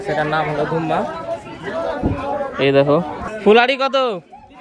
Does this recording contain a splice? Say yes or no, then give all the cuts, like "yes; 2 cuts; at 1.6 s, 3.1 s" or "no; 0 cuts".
yes; 1 cut; at 3.3 s